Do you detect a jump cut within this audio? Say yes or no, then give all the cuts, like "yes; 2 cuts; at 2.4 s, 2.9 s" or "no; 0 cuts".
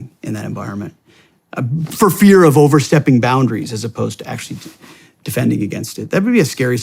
no; 0 cuts